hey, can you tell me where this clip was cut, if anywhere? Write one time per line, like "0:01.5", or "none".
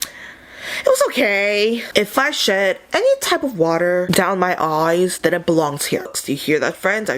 0:01.8
0:06.1

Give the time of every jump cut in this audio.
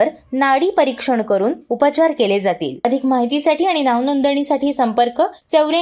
0:02.8

